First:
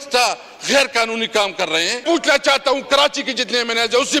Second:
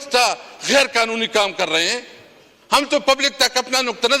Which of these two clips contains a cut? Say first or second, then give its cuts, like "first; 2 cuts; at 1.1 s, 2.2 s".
first; 1 cut; at 2.0 s